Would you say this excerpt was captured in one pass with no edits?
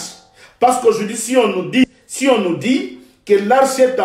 no; 1 cut; at 1.8 s

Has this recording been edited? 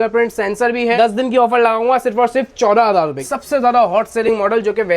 yes; 2 cuts; at 0.9 s, 3.2 s

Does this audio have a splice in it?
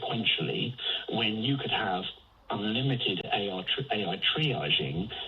no; 0 cuts

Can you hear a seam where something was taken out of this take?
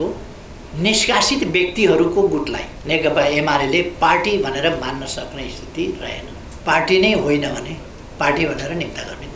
yes; 2 cuts; at 2.7 s, 6.4 s

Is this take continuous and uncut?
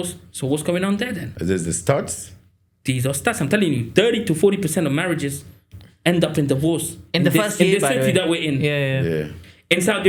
yes; 0 cuts

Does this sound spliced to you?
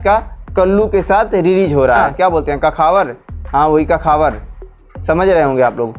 yes; 1 cut; at 2.1 s

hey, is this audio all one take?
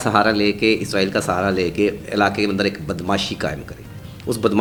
yes; 0 cuts

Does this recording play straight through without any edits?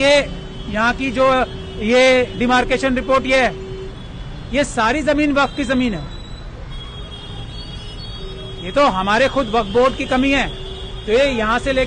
yes; 0 cuts

